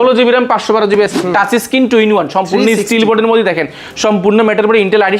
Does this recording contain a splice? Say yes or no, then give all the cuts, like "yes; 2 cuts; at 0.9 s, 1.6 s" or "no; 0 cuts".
yes; 1 cut; at 1.1 s